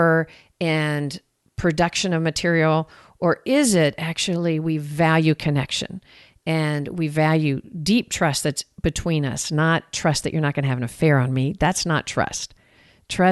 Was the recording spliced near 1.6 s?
no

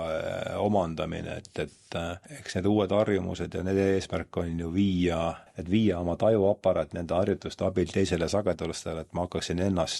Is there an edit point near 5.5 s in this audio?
yes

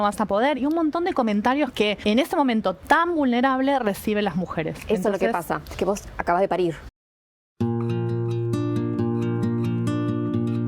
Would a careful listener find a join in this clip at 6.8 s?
yes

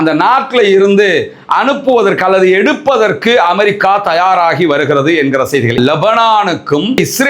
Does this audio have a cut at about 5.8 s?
yes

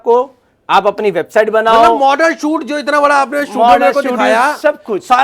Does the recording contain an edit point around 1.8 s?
no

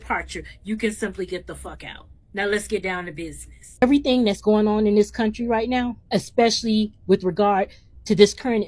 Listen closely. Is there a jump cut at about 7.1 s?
no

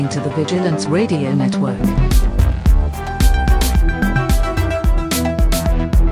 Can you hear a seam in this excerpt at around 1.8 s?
yes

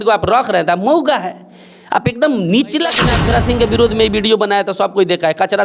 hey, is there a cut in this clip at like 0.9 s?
no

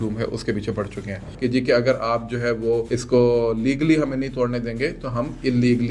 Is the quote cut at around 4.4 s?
no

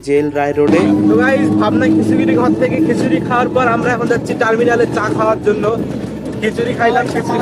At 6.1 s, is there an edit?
no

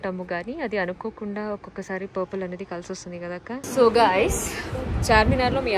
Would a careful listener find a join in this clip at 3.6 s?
yes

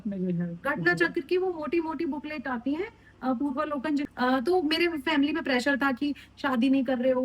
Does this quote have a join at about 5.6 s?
no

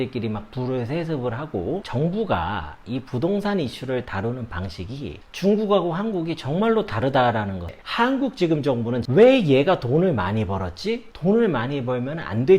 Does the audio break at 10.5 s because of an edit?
no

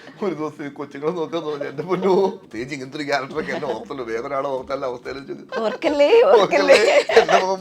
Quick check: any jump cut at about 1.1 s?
no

